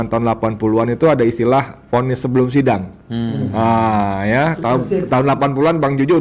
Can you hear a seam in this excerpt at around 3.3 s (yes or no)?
no